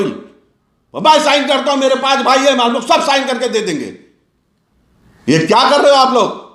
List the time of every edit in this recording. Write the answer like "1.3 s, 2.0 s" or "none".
none